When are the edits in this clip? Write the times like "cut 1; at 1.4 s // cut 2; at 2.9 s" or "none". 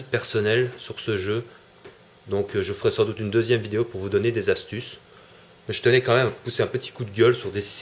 cut 1; at 1.6 s

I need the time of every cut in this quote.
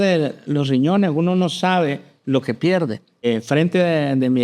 cut 1; at 3.3 s

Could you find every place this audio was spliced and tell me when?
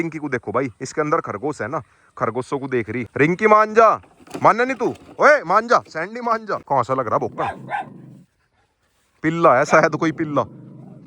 cut 1; at 3.0 s // cut 2; at 6.5 s

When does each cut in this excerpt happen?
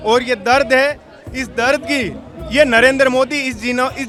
none

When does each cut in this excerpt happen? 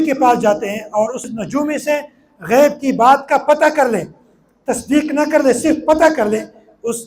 cut 1; at 1.3 s

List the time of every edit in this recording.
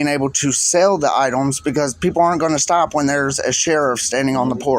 none

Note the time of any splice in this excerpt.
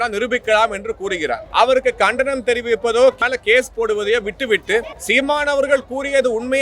cut 1; at 1.4 s // cut 2; at 3.2 s // cut 3; at 4.9 s

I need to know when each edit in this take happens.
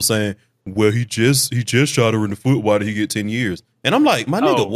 none

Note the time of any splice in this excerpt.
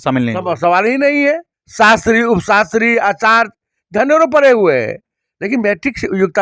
cut 1; at 1.6 s

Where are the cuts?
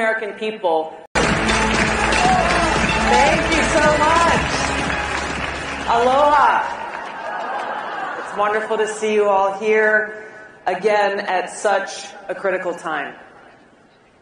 cut 1; at 1.1 s // cut 2; at 6.1 s // cut 3; at 11.1 s

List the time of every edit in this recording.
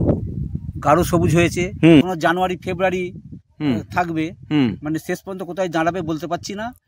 cut 1; at 2.0 s

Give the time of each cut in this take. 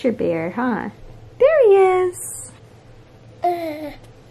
none

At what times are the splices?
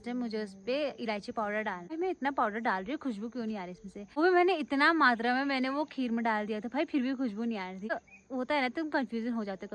cut 1; at 1.9 s // cut 2; at 4.2 s // cut 3; at 7.9 s

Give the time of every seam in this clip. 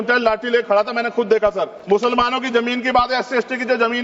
cut 1; at 1.8 s

